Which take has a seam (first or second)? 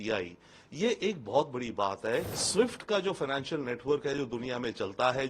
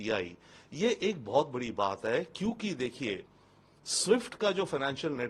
first